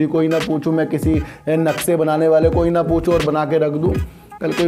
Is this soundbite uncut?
yes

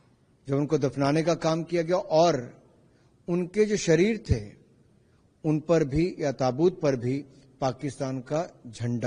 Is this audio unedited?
yes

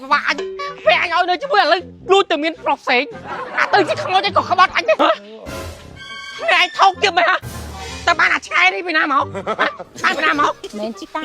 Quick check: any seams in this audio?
yes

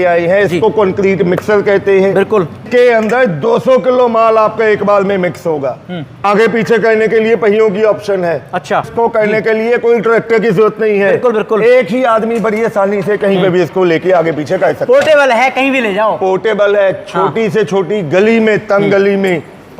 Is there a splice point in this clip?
yes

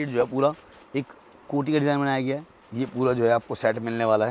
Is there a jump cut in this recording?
yes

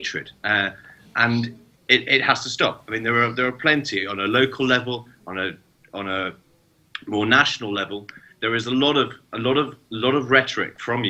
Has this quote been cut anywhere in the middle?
no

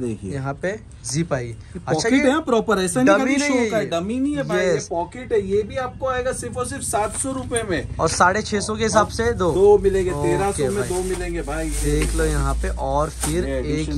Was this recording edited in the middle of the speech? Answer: no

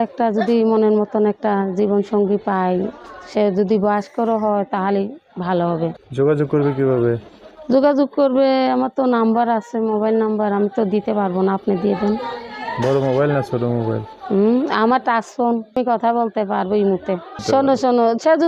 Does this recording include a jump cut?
yes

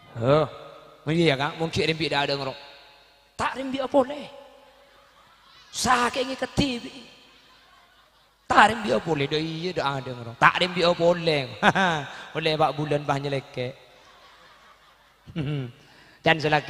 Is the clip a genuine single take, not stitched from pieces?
yes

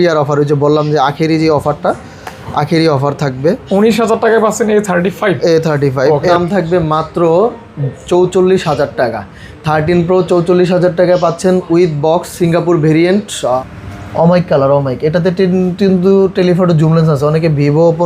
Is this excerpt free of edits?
no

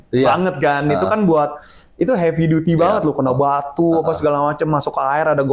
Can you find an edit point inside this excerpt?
no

